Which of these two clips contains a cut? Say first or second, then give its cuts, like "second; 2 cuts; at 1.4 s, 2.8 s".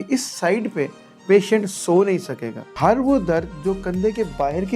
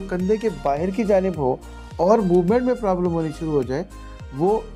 first; 1 cut; at 2.7 s